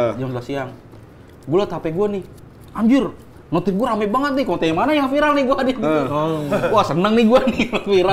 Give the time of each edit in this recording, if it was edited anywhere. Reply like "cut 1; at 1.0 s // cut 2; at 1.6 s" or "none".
none